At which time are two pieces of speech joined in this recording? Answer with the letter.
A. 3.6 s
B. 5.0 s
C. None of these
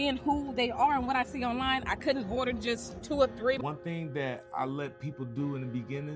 A